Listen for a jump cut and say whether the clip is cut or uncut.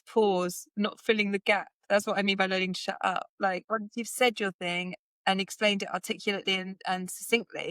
uncut